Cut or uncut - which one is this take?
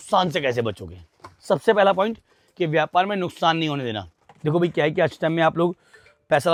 uncut